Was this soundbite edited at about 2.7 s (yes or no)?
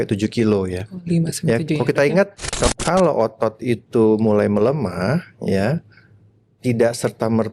yes